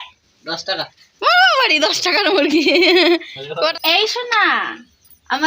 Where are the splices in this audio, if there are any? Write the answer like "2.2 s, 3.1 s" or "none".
3.7 s